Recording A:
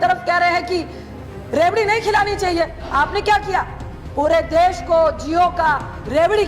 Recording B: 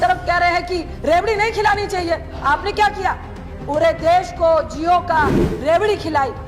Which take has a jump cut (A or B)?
B